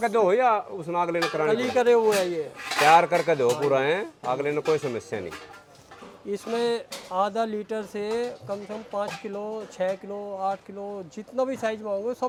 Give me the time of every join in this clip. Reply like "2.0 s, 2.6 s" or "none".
none

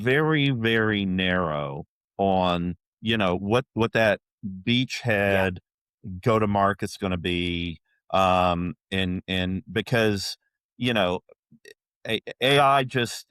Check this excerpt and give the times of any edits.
none

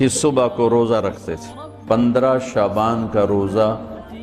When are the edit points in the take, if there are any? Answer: 1.8 s

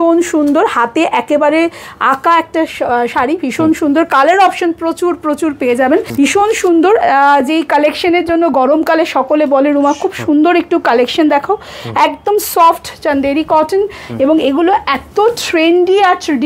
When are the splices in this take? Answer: 6.1 s

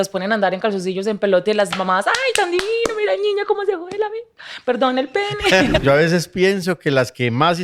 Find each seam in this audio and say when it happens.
5.8 s

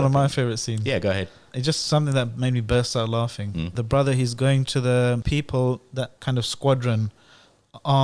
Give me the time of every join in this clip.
1.5 s, 3.8 s, 5.2 s, 6.2 s

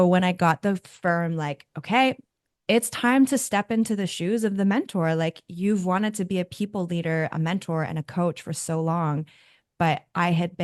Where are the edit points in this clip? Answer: none

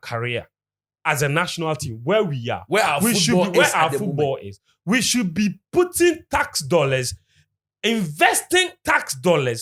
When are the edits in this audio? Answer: none

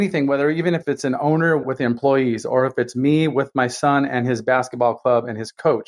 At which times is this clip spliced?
0.8 s, 1.6 s

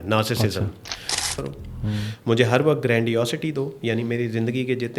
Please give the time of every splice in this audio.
1.4 s

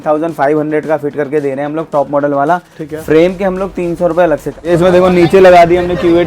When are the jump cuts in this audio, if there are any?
4.5 s

